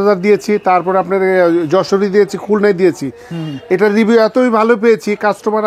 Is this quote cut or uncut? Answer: uncut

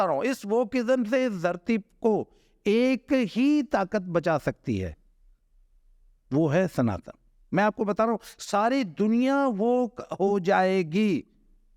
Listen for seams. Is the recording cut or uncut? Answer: uncut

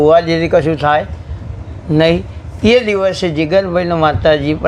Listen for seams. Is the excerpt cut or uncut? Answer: uncut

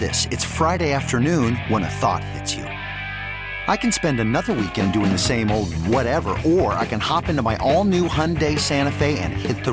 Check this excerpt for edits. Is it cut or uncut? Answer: uncut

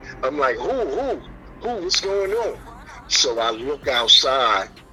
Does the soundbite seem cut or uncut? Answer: uncut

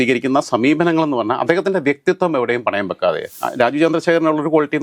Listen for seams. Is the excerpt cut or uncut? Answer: cut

